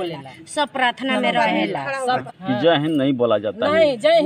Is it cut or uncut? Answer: cut